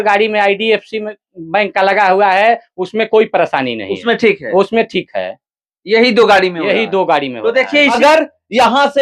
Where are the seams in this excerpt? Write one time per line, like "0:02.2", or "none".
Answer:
0:07.9